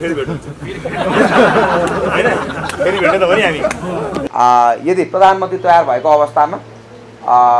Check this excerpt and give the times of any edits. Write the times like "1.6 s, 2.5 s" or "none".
4.2 s